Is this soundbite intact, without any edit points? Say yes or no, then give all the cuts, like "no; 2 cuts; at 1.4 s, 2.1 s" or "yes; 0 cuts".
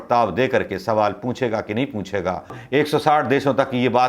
no; 1 cut; at 2.6 s